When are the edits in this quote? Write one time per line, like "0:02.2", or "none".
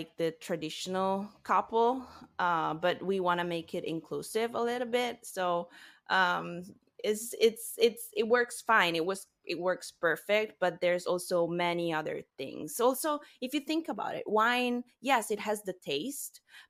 none